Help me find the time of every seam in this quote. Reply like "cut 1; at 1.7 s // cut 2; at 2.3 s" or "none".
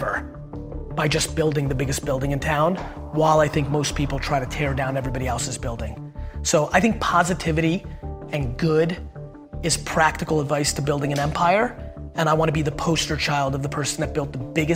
none